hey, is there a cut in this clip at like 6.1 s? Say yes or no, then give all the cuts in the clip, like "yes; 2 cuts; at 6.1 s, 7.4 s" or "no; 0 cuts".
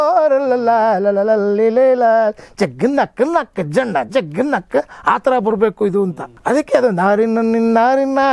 yes; 1 cut; at 6.1 s